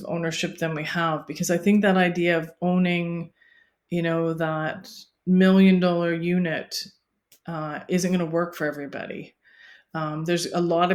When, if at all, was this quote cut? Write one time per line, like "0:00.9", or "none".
none